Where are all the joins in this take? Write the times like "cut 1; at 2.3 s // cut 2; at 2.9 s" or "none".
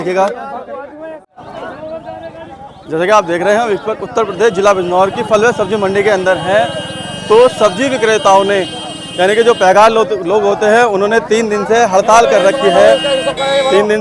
cut 1; at 1.3 s